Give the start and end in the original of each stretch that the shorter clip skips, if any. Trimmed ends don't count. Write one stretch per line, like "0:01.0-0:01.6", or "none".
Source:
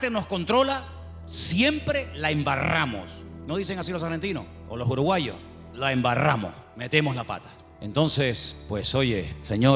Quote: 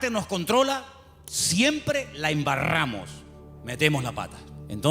0:03.4-0:06.5

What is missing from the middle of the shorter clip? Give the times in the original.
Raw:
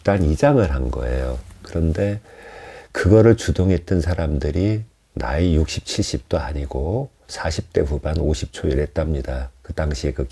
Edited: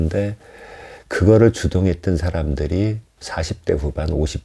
0:05.0-0:07.2

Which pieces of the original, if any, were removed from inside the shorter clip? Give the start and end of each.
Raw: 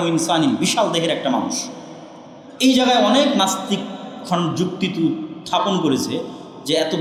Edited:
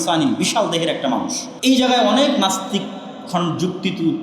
0:01.6-0:02.4

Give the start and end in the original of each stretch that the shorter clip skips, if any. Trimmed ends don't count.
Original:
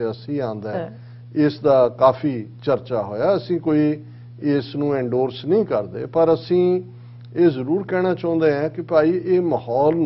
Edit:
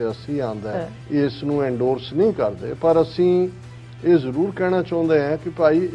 0:00.9-0:04.2

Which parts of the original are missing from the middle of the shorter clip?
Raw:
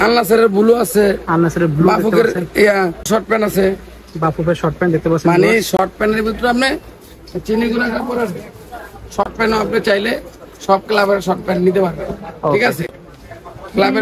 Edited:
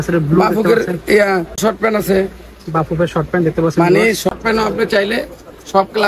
0:05.8-0:09.2

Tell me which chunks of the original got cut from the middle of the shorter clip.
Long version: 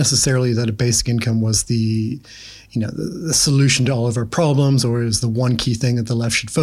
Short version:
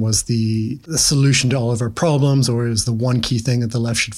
0:02.3-0:03.3

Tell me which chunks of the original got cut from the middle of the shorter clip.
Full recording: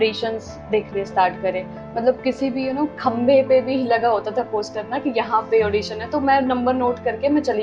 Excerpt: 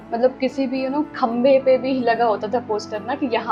none

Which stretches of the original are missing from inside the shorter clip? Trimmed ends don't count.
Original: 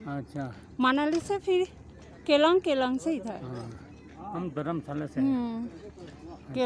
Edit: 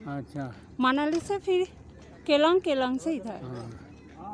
none

